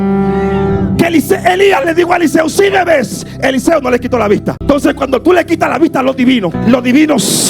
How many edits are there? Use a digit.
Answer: 2